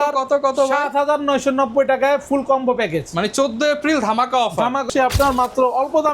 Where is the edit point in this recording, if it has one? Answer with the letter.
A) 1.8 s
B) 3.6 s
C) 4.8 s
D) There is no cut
C